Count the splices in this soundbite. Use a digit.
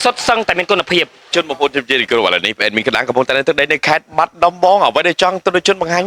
1